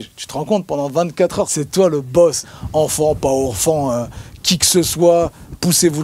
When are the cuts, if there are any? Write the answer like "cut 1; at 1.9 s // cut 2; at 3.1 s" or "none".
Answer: cut 1; at 1.6 s // cut 2; at 2.5 s